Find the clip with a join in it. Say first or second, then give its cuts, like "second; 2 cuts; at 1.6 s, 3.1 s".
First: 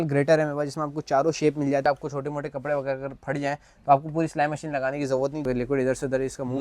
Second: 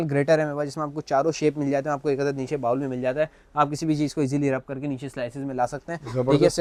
first; 2 cuts; at 1.8 s, 5.4 s